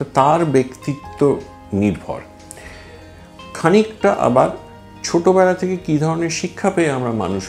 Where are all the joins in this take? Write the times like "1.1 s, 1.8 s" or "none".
none